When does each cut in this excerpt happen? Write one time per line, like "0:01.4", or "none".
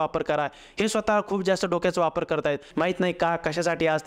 0:02.7